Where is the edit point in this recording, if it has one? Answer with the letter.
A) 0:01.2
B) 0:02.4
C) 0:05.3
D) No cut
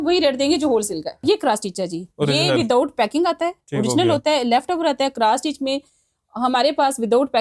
A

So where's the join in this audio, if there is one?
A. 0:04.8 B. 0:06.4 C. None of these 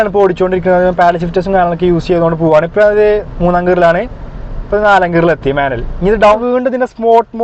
B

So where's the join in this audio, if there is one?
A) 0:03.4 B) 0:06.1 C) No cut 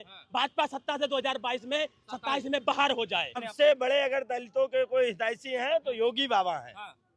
A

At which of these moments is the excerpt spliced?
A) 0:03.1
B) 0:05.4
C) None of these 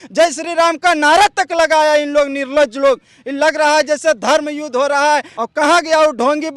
B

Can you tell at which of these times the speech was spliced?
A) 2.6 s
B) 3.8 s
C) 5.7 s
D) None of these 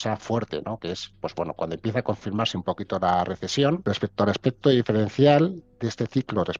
B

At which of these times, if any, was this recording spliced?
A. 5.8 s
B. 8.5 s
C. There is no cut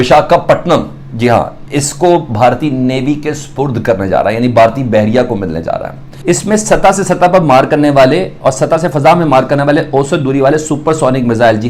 A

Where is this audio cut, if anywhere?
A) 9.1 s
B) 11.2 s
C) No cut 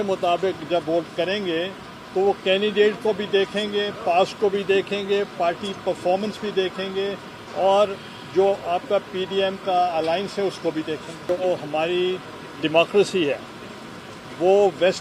B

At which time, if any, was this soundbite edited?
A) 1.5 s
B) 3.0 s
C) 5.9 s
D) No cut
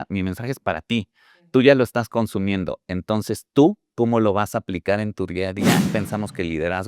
C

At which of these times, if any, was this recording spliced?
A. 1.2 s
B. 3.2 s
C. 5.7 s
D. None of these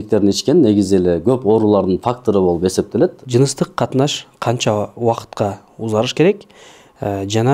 B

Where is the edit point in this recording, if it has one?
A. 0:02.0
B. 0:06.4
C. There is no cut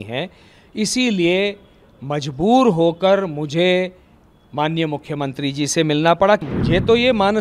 B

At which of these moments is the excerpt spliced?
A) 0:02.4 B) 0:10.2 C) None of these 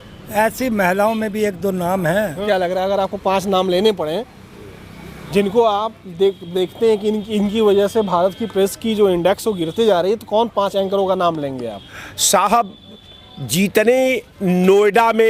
A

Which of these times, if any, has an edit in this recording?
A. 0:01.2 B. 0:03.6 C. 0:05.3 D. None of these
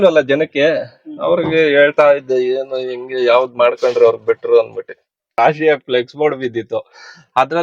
C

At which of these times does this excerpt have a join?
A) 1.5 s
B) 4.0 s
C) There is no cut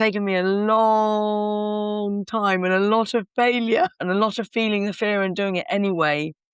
B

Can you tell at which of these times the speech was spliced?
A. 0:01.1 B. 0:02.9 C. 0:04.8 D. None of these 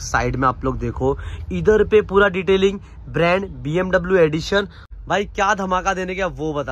C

